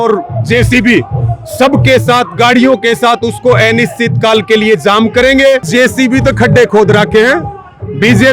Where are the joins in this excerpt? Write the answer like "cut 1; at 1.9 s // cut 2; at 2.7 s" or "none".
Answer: cut 1; at 5.7 s